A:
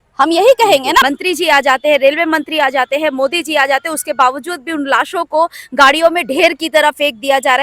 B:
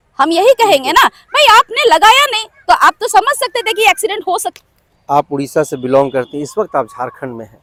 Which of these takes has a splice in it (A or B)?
A